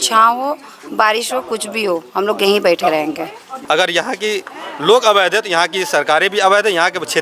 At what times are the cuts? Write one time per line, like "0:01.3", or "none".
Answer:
0:03.5